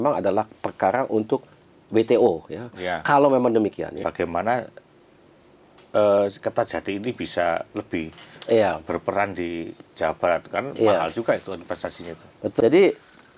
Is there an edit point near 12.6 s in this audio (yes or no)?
yes